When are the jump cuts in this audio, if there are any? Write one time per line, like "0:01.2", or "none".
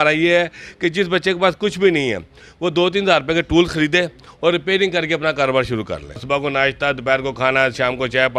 0:06.2